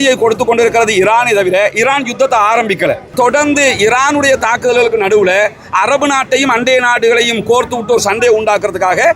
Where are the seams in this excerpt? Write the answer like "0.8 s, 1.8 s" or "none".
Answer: 3.0 s